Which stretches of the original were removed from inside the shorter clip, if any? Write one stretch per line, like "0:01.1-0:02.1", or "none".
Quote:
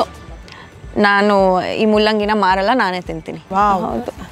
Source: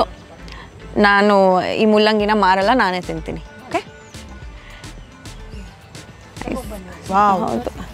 0:03.3-0:06.9